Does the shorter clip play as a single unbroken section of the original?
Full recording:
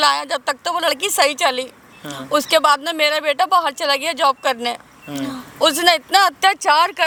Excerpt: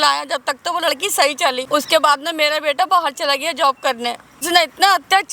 no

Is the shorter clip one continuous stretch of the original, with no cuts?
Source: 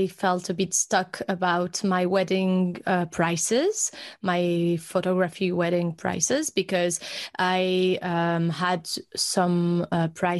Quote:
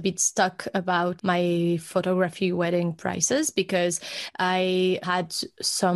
no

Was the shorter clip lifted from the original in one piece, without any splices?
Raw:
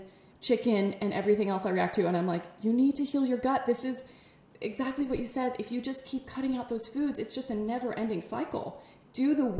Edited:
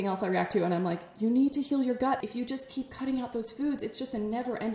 no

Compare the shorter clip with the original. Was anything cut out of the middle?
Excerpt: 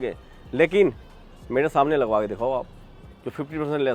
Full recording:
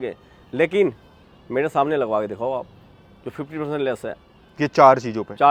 no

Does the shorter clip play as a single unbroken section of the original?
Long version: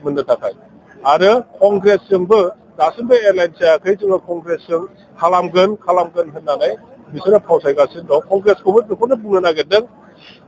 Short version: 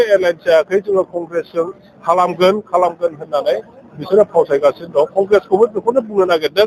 yes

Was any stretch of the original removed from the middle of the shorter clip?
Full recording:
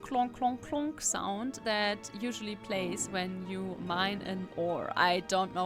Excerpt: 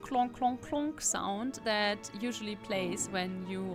no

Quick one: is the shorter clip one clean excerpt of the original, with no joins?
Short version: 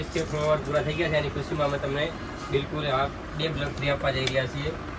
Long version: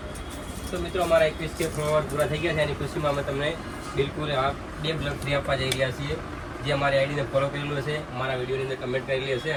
yes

